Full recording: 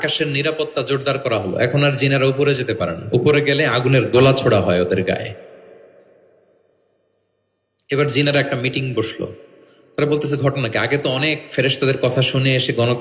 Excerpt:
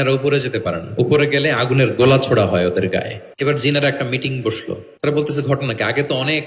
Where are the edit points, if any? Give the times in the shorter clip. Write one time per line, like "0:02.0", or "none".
0:03.2
0:04.6